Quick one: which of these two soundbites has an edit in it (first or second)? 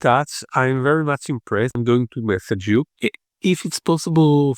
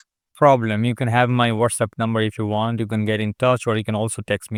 first